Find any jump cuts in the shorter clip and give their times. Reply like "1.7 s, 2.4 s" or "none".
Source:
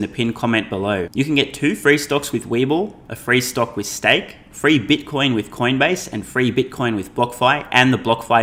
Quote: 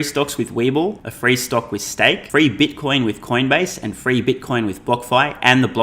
1.1 s, 2.2 s